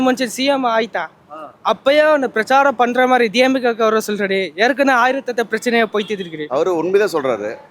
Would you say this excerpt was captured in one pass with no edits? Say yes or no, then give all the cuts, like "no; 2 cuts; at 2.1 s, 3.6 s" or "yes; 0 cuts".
no; 1 cut; at 6.3 s